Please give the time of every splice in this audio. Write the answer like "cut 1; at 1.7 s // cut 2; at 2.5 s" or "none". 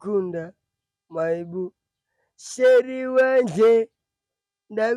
none